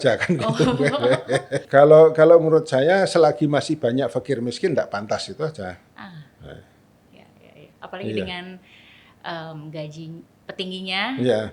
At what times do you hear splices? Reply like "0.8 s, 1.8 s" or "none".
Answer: 1.7 s